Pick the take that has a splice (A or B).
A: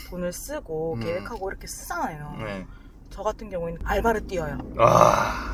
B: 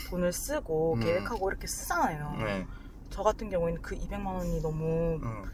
A